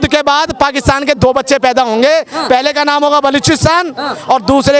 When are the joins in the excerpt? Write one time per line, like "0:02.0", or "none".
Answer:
none